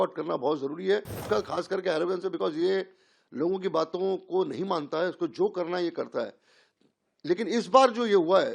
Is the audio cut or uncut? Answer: cut